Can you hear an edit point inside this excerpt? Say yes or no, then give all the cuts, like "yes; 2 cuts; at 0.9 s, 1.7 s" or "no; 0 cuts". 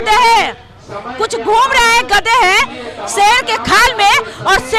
no; 0 cuts